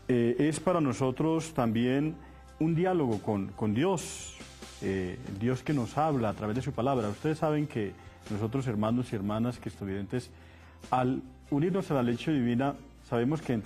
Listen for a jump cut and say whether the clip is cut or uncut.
uncut